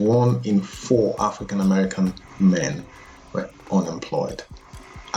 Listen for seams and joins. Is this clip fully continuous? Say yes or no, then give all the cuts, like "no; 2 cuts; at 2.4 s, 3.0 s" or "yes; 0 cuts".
yes; 0 cuts